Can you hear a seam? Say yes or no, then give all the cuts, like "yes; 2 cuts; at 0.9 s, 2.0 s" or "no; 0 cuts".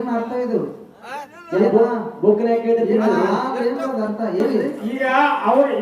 yes; 1 cut; at 4.6 s